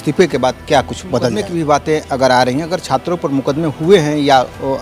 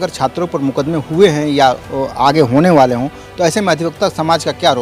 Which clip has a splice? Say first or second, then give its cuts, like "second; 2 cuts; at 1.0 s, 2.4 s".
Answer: first; 1 cut; at 1.4 s